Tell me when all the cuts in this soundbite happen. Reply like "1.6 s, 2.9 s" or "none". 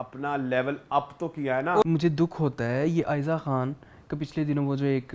1.8 s